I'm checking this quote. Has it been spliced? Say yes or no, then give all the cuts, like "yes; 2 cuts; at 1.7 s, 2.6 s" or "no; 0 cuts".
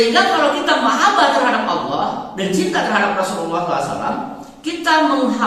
no; 0 cuts